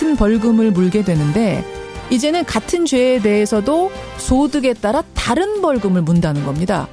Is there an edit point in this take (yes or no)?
yes